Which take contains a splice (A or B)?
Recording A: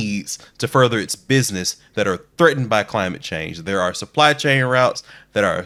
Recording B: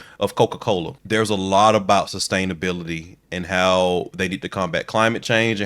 B